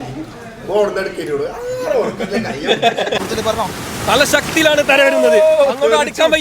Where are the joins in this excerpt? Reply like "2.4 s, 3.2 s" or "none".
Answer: 3.2 s